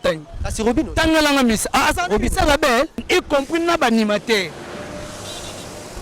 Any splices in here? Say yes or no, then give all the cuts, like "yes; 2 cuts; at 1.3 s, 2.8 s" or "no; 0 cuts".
yes; 1 cut; at 3.0 s